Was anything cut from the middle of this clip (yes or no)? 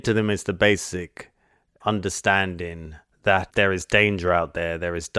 yes